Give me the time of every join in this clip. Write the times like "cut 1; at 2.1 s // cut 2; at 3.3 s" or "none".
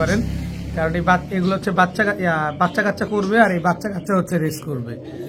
none